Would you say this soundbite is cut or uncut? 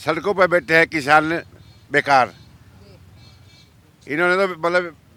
uncut